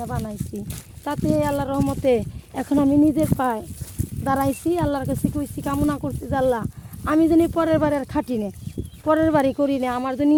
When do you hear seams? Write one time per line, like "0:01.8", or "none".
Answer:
none